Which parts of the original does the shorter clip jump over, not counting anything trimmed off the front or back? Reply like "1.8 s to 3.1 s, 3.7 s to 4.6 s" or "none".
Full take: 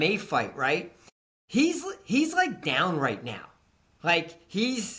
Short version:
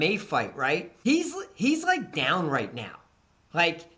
0.9 s to 1.4 s